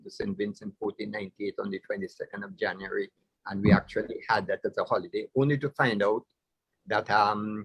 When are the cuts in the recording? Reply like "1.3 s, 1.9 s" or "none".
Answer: none